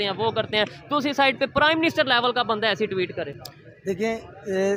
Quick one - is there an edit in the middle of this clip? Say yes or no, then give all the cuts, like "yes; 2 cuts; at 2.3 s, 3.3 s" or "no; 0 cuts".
no; 0 cuts